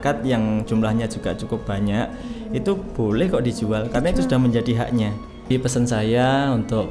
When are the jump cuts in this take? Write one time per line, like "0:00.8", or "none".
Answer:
0:05.5